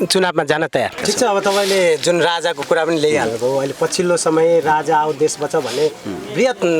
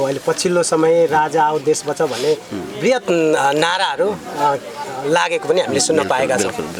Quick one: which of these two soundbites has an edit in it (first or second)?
first